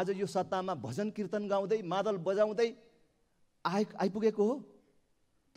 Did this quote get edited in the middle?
no; 0 cuts

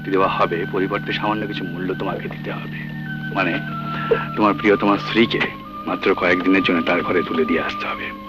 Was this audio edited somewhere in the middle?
no; 0 cuts

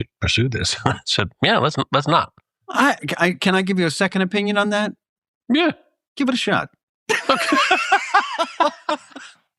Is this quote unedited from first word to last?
yes; 0 cuts

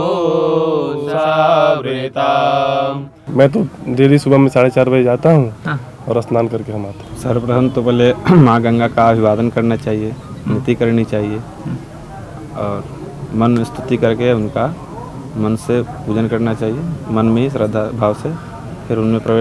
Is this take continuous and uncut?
no; 2 cuts; at 3.2 s, 7.0 s

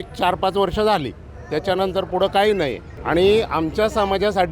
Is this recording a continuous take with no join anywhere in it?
yes; 0 cuts

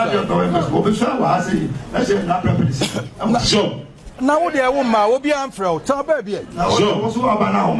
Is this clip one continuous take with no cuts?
yes; 0 cuts

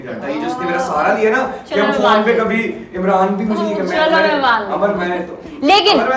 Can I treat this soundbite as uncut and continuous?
yes; 0 cuts

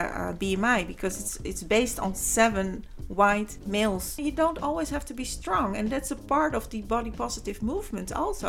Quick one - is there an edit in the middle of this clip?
yes; 1 cut; at 4.1 s

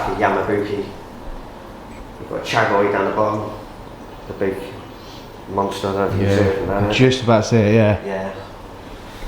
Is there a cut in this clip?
no; 0 cuts

